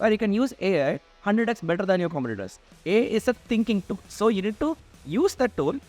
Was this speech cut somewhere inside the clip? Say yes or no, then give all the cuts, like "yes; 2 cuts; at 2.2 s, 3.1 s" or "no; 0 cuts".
yes; 1 cut; at 2.7 s